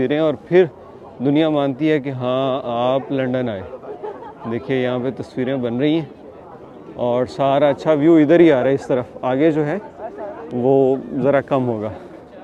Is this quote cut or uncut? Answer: uncut